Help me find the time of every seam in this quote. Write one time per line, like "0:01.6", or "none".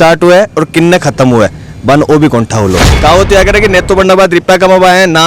0:02.9